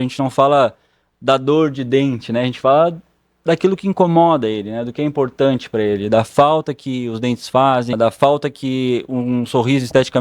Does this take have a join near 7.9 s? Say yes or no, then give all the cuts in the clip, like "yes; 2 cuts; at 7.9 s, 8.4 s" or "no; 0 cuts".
yes; 1 cut; at 7.9 s